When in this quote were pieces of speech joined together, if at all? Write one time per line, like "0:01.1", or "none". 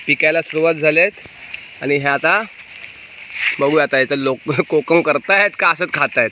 none